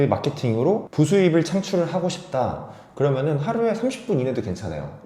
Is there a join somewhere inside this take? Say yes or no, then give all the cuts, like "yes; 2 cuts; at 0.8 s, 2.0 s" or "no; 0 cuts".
no; 0 cuts